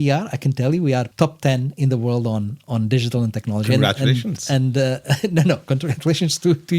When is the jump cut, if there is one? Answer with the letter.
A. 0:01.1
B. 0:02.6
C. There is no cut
A